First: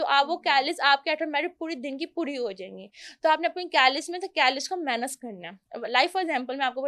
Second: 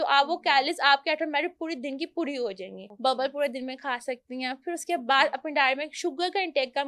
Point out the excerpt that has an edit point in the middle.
second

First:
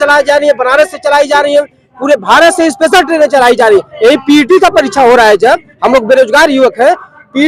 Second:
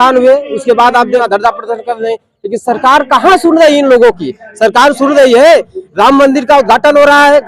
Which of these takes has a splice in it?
second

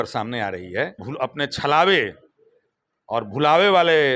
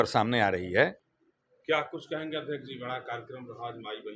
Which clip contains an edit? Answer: first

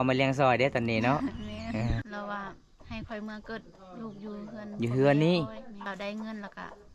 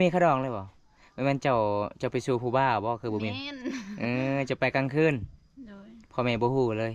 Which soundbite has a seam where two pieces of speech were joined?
first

